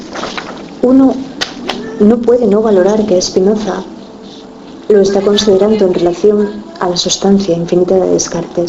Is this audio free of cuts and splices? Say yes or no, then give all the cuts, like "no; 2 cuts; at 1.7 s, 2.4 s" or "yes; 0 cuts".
no; 1 cut; at 7.6 s